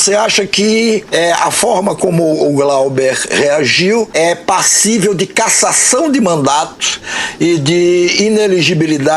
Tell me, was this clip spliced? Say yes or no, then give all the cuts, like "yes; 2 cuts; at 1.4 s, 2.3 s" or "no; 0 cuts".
yes; 2 cuts; at 1.1 s, 4.1 s